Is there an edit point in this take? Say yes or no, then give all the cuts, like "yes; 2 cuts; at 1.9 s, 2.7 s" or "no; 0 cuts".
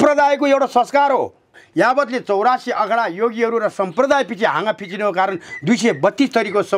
yes; 1 cut; at 1.6 s